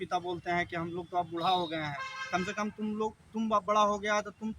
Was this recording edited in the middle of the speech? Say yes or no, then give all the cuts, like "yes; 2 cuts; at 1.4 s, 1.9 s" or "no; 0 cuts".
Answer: no; 0 cuts